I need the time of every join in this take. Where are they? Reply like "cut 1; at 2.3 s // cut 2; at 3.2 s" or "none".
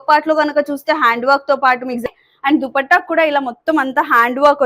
cut 1; at 2.0 s